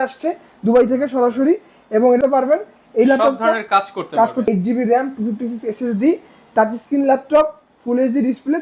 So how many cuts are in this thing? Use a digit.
2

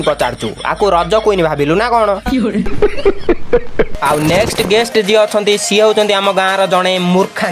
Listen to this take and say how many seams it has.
1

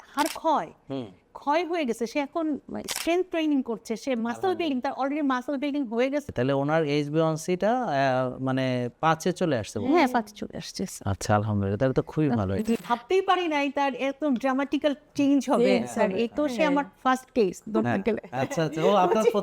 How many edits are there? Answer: 2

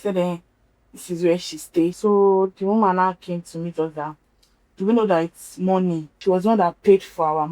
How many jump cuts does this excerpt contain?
2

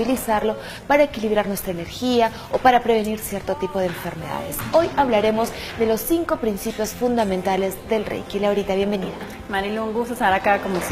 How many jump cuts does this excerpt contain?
1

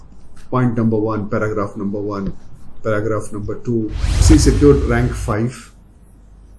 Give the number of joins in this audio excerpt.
1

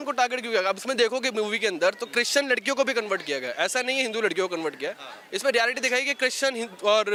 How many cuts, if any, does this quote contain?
0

